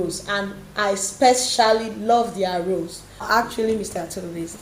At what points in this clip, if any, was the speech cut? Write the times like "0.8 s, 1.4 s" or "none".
3.2 s